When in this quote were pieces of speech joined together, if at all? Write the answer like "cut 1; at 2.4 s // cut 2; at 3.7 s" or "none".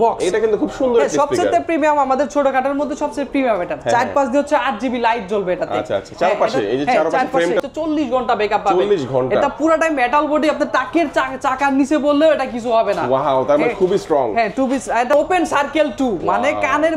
cut 1; at 7.6 s // cut 2; at 15.1 s